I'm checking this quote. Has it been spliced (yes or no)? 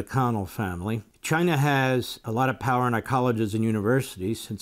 yes